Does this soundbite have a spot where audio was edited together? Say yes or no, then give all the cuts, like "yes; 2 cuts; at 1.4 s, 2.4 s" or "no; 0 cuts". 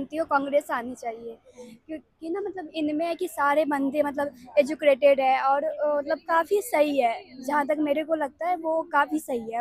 no; 0 cuts